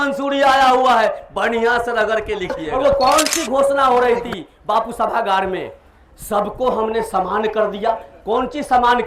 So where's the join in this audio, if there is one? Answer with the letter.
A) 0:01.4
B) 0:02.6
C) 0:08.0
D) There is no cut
B